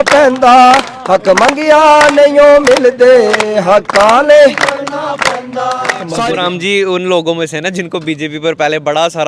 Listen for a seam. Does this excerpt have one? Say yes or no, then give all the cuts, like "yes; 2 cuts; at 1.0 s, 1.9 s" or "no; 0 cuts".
yes; 1 cut; at 6.0 s